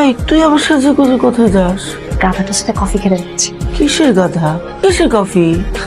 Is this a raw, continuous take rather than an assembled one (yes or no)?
no